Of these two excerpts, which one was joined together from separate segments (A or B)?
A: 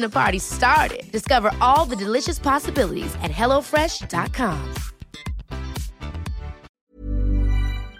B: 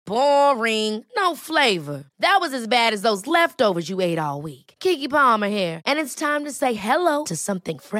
A